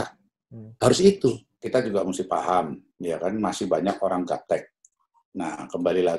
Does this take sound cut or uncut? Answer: cut